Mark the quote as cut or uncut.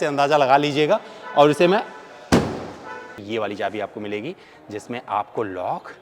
cut